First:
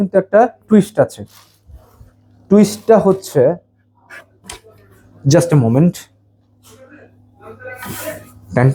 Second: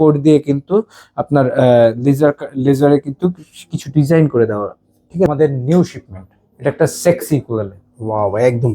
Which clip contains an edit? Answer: second; 1 cut; at 5.3 s

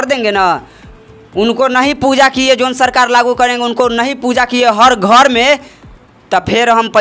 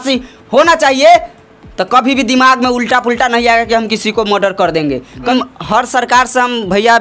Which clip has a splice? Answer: second; 1 cut; at 5.3 s

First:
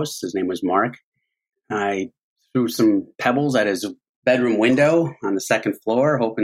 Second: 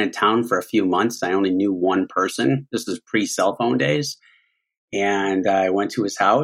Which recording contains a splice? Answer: first; 1 cut; at 1.5 s

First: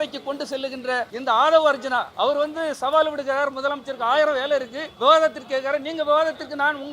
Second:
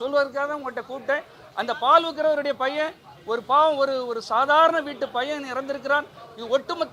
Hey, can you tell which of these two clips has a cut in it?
first; 3 cuts; at 1.1 s, 2.1 s, 4.8 s

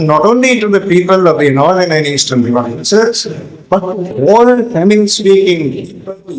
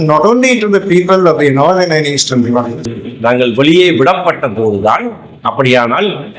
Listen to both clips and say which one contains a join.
second; 1 cut; at 2.8 s

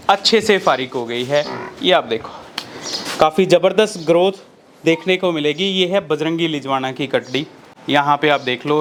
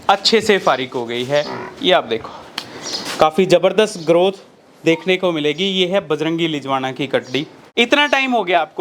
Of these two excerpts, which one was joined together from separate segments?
second; 1 cut; at 7.6 s

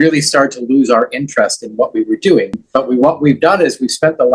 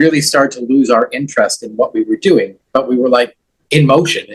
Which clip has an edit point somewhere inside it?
first; 1 cut; at 3.0 s

